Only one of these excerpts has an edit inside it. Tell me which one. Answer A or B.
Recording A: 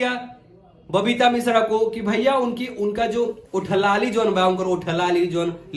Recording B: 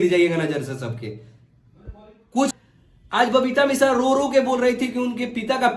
B